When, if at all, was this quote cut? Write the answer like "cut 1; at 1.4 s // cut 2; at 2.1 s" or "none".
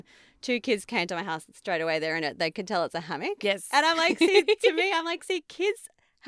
none